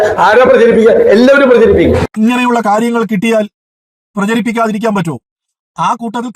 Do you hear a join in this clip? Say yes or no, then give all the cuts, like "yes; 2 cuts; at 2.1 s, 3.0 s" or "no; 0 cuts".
yes; 1 cut; at 1.5 s